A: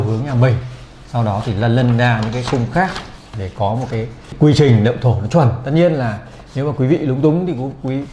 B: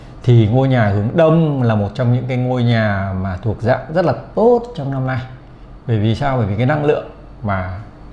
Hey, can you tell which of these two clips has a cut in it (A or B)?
A